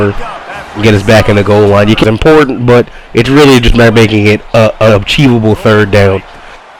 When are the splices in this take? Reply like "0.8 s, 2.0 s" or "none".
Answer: 2.0 s